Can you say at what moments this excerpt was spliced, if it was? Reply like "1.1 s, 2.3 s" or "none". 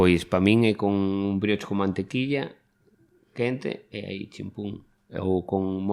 none